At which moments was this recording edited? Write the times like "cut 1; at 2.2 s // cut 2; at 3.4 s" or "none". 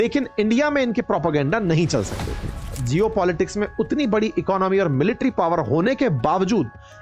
cut 1; at 2.8 s